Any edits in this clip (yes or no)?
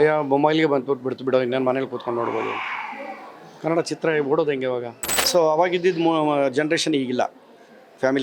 yes